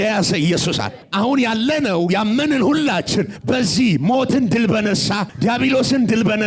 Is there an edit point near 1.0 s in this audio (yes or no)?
yes